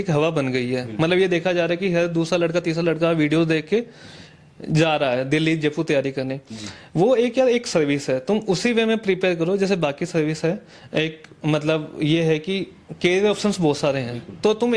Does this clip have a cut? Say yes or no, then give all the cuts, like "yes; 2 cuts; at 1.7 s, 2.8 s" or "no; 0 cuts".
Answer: no; 0 cuts